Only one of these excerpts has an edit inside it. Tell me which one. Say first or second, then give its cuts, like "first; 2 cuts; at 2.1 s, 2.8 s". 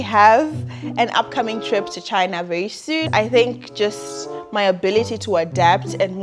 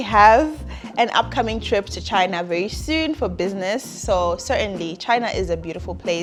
first; 1 cut; at 3.1 s